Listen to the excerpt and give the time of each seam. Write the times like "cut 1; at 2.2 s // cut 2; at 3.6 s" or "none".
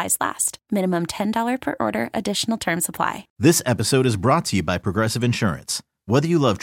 cut 1; at 3.3 s